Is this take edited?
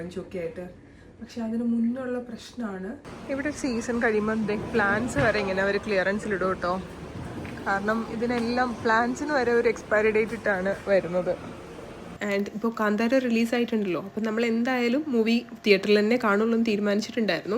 yes; 2 cuts; at 3.1 s, 12.1 s

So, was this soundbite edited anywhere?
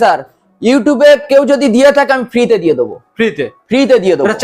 no; 0 cuts

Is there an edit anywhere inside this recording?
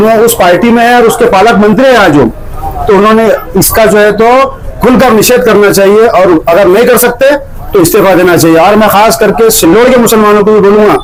no; 0 cuts

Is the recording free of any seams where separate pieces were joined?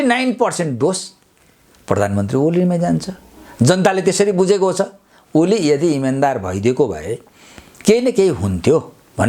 yes; 0 cuts

